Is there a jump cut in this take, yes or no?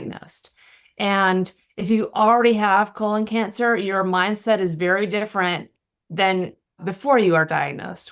yes